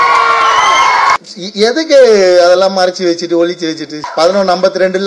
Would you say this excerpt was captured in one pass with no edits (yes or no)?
no